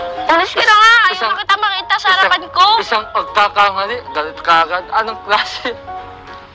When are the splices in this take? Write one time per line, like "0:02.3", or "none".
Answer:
none